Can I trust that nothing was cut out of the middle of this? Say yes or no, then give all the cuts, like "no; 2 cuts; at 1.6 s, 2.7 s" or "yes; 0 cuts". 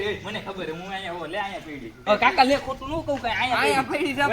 no; 1 cut; at 2.0 s